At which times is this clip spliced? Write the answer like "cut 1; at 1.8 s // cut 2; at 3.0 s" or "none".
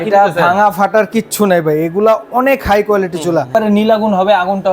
cut 1; at 3.5 s